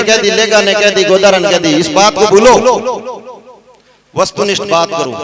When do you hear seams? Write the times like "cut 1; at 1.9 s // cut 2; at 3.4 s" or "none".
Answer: none